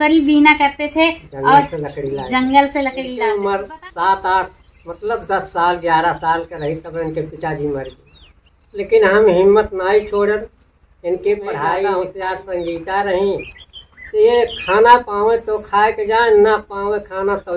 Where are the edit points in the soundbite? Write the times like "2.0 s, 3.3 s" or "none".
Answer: 3.0 s, 12.0 s